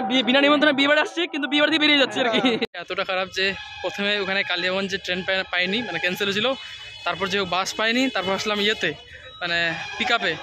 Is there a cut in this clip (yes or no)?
yes